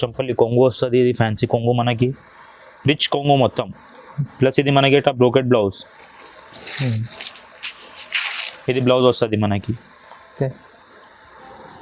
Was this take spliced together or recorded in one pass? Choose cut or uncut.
uncut